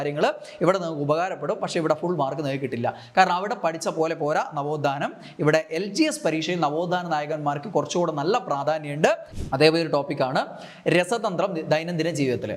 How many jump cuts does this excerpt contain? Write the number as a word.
one